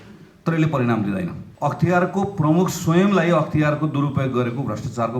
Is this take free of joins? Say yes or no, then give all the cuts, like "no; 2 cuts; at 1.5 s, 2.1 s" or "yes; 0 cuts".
no; 1 cut; at 1.4 s